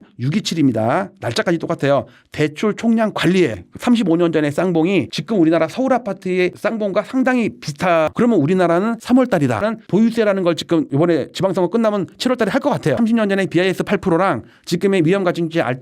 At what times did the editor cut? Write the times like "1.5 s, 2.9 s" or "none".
3.5 s, 8.1 s, 9.6 s, 13.0 s